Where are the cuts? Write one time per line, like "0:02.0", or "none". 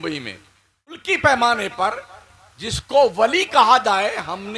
0:01.0